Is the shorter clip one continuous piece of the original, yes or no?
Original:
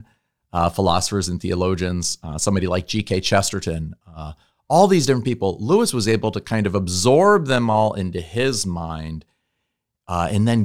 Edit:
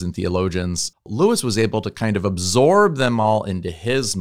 no